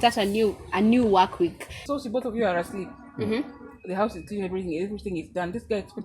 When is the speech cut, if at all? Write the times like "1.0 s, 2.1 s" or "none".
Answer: 1.8 s